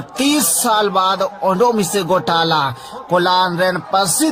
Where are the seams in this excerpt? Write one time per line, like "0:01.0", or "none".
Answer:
none